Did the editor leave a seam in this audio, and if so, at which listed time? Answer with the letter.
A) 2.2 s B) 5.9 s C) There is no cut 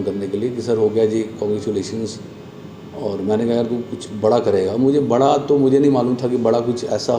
C